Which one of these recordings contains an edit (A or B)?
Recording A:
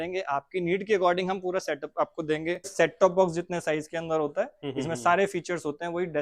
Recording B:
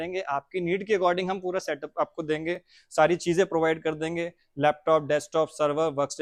A